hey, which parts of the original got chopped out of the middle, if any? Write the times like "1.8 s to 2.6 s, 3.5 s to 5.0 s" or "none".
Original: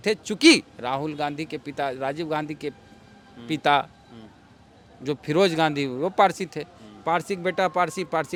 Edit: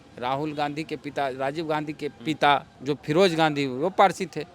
2.8 s to 3.4 s, 4.0 s to 4.9 s